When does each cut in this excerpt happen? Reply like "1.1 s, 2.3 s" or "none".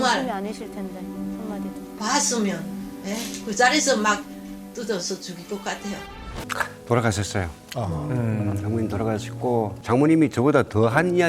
6.4 s, 9.8 s